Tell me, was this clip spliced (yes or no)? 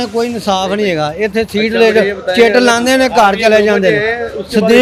no